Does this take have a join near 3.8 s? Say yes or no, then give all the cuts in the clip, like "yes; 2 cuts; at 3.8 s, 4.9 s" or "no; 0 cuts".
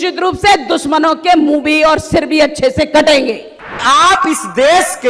yes; 1 cut; at 3.8 s